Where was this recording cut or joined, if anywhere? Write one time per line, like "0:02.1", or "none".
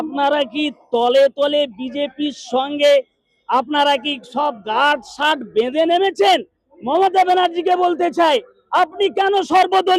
none